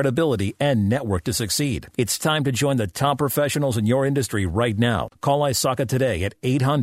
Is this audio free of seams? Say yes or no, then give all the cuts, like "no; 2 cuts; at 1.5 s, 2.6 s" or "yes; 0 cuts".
yes; 0 cuts